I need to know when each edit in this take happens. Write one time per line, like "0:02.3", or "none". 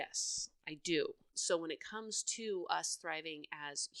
0:01.3